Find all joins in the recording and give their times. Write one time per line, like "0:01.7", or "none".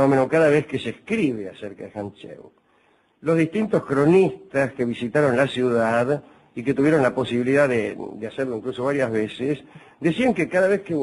none